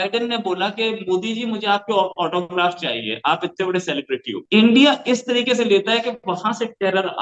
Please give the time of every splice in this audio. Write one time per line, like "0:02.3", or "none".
0:04.3